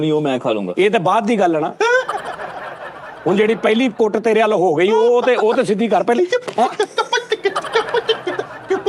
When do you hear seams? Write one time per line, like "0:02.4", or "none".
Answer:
none